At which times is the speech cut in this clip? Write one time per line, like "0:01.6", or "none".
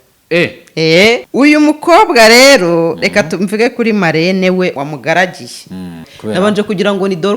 0:01.3
0:04.7
0:06.1